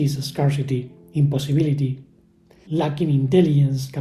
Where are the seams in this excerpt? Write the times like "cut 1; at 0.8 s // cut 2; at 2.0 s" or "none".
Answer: none

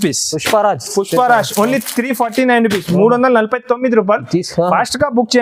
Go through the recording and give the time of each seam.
none

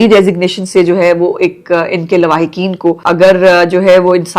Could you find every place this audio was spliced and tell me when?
cut 1; at 3.0 s

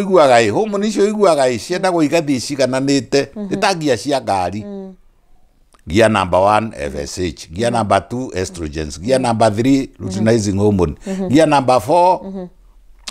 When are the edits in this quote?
none

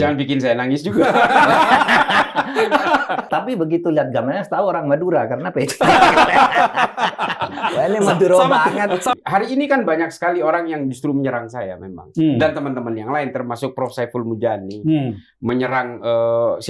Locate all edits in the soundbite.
cut 1; at 3.2 s // cut 2; at 9.2 s

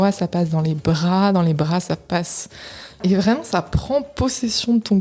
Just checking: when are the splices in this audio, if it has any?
cut 1; at 3.0 s

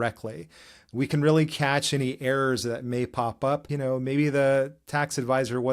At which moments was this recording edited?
cut 1; at 3.7 s

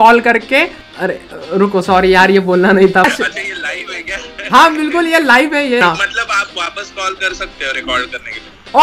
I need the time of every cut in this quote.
cut 1; at 1.2 s // cut 2; at 3.0 s // cut 3; at 5.8 s

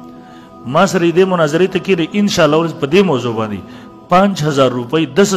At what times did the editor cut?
none

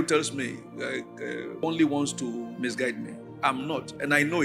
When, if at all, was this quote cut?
cut 1; at 1.6 s

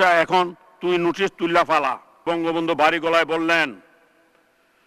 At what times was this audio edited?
cut 1; at 2.2 s

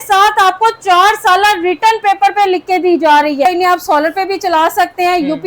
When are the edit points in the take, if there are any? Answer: cut 1; at 3.5 s

